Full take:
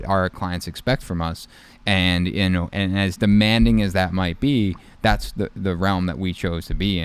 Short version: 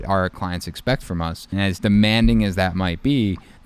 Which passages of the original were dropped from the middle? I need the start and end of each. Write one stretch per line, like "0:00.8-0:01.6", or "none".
0:01.5-0:02.9